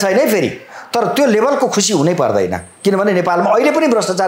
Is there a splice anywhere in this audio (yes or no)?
no